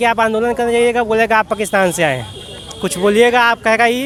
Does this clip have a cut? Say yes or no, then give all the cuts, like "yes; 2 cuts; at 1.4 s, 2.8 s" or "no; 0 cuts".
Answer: no; 0 cuts